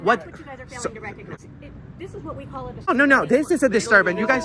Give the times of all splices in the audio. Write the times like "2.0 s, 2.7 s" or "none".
1.3 s, 2.9 s